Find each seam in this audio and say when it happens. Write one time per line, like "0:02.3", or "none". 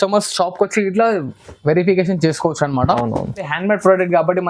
0:03.5